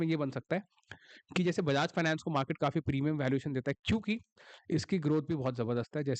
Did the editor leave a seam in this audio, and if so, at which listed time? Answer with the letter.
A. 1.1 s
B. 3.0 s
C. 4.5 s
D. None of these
D